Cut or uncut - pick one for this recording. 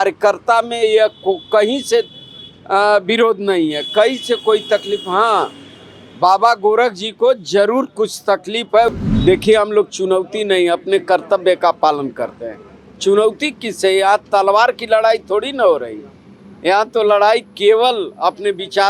cut